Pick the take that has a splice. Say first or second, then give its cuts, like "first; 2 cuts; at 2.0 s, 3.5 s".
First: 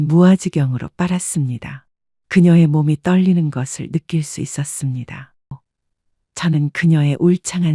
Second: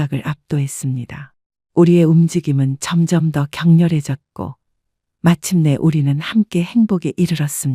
first; 1 cut; at 5.6 s